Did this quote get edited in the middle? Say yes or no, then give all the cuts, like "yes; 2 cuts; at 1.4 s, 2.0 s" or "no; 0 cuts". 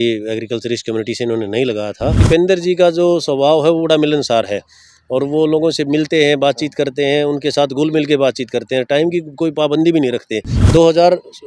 yes; 2 cuts; at 2.2 s, 10.6 s